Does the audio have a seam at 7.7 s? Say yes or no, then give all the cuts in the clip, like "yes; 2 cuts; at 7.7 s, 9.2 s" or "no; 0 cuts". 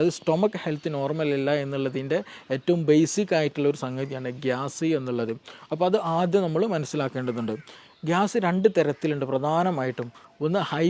yes; 1 cut; at 7.7 s